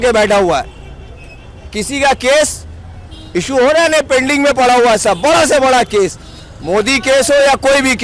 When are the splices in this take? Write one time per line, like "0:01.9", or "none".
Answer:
none

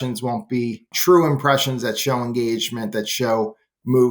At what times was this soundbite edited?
0:00.9

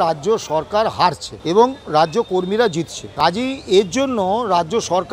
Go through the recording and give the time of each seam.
0:01.3
0:03.0

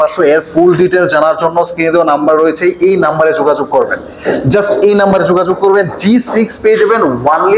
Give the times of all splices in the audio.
none

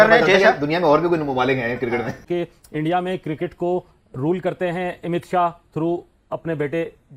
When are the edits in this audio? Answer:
0:02.2

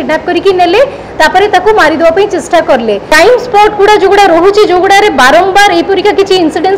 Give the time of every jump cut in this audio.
0:03.1

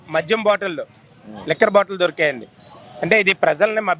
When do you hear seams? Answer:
none

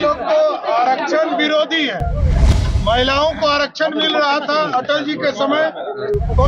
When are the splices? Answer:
none

